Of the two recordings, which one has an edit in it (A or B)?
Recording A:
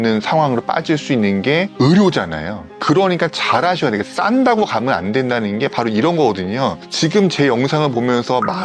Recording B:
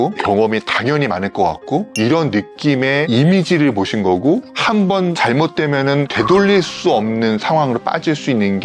B